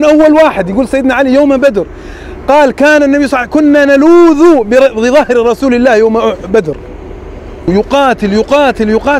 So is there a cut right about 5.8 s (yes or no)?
no